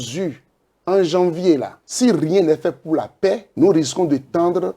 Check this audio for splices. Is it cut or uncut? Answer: cut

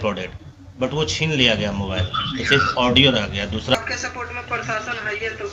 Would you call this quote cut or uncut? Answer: cut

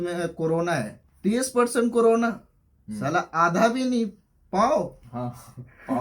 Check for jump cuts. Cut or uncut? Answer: cut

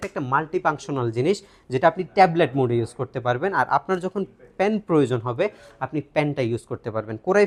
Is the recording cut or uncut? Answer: uncut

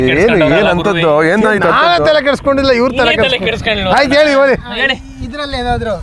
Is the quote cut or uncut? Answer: uncut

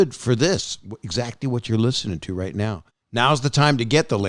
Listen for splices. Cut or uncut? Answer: cut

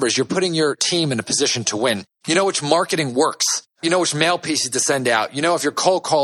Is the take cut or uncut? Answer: uncut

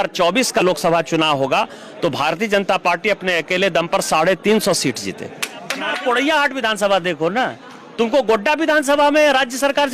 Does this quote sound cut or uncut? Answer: cut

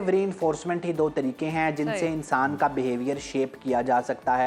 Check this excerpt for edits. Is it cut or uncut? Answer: uncut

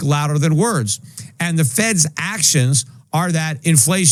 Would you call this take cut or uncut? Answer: uncut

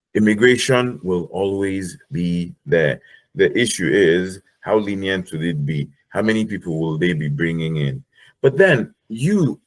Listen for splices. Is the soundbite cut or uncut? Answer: uncut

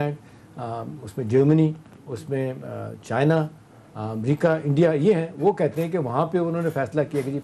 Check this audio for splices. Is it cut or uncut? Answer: uncut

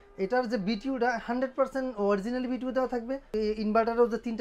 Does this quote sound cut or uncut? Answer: cut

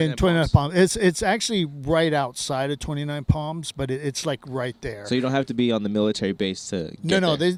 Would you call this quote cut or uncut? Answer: uncut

